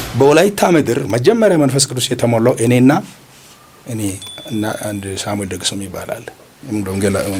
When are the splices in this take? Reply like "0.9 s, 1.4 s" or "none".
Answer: none